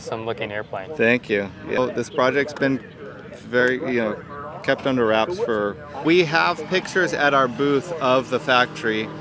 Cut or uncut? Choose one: cut